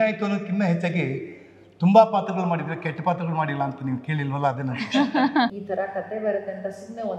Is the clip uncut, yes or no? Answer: no